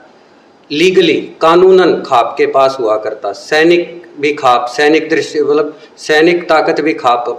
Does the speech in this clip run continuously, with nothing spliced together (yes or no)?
yes